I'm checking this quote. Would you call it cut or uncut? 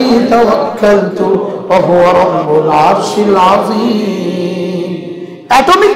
uncut